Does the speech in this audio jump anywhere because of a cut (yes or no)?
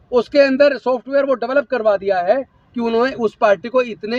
no